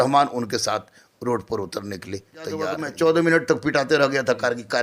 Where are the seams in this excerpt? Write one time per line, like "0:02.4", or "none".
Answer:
0:02.8